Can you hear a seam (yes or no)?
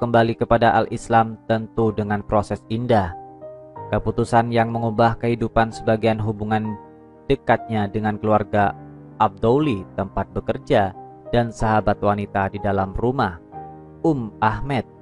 no